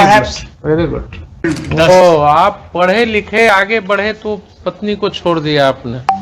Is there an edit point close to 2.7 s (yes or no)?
no